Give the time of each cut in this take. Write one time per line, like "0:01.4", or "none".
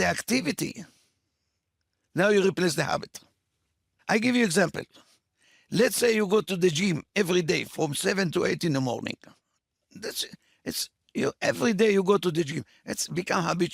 0:03.9